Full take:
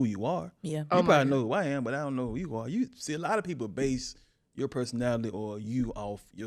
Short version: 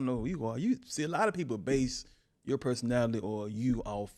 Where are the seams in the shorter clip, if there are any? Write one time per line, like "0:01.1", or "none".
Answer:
none

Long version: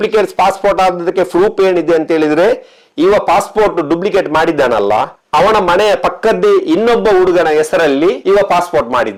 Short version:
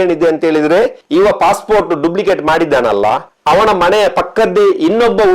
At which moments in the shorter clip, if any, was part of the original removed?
0:01.0

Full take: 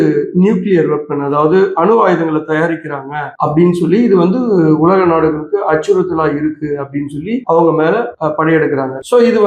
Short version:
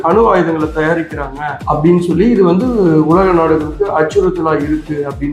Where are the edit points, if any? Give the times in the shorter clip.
none

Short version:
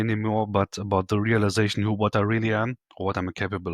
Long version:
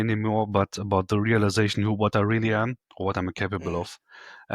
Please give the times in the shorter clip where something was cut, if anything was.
none

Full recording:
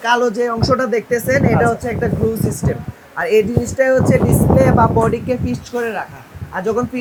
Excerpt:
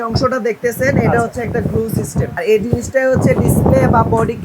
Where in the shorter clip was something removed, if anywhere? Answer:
0:02.3

